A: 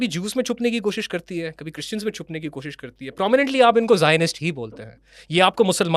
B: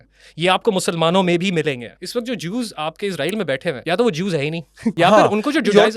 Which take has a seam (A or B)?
B